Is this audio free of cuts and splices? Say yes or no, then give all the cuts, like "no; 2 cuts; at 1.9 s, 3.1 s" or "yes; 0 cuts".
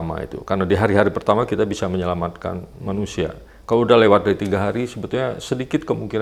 yes; 0 cuts